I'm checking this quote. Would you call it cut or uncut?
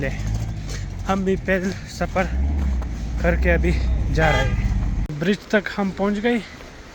cut